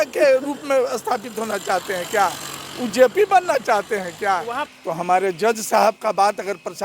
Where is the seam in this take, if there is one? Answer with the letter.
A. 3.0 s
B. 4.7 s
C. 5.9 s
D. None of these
B